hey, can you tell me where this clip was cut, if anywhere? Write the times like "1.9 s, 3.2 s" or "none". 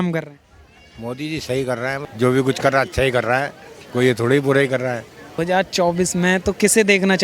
2.0 s, 5.4 s